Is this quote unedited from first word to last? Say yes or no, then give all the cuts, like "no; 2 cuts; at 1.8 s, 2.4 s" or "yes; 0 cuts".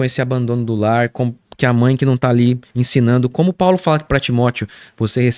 yes; 0 cuts